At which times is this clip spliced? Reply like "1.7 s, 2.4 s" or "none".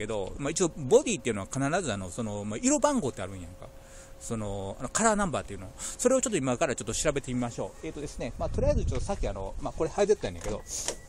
7.0 s

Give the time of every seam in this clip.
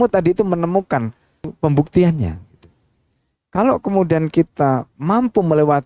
1.5 s

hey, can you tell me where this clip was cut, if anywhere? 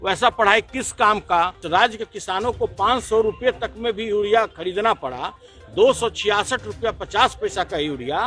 1.6 s

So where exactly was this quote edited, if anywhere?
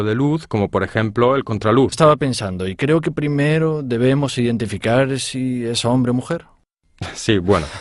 none

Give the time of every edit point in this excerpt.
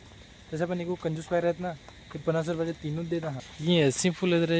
3.5 s

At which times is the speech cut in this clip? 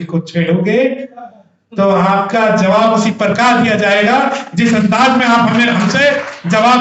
none

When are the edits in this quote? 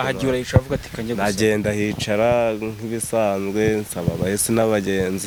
none

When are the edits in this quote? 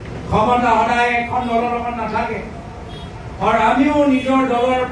none

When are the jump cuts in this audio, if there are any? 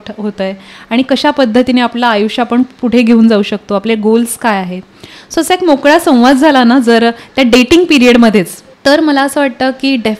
8.6 s

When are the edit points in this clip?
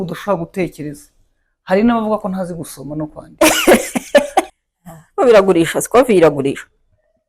4.6 s

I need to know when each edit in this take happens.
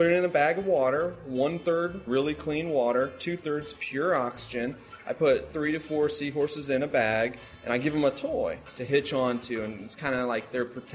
2.0 s, 5.5 s, 8.7 s

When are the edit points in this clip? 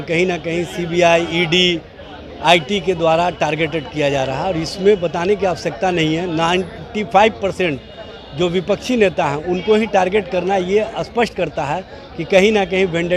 none

